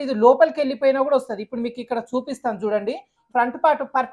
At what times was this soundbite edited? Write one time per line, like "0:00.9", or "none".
0:03.2